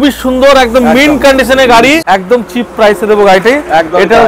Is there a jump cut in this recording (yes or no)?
yes